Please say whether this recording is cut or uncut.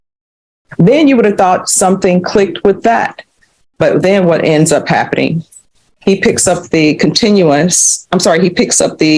uncut